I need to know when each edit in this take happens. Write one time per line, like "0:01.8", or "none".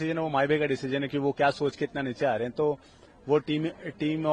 none